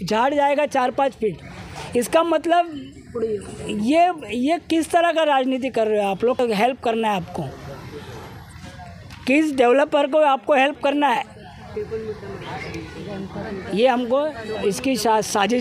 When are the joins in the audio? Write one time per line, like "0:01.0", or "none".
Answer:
0:06.4